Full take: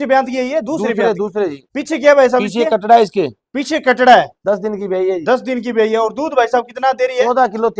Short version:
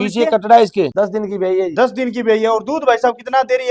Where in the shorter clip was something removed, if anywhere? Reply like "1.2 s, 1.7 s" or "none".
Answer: 0.9 s